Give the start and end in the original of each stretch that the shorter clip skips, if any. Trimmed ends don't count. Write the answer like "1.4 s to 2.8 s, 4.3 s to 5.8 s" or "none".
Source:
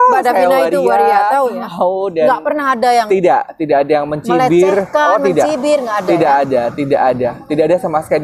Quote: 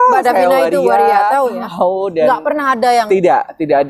none